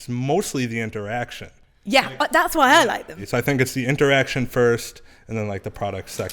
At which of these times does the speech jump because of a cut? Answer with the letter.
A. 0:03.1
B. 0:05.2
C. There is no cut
A